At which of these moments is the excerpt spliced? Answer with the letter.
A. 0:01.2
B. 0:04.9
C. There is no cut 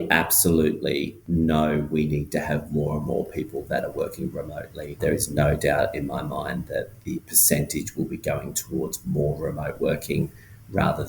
A